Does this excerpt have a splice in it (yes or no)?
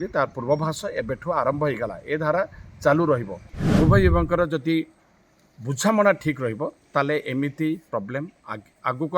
yes